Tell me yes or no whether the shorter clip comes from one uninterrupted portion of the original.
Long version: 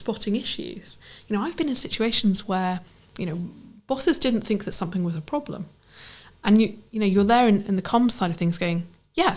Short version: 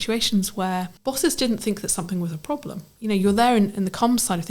no